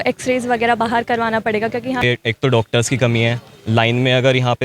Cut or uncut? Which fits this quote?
cut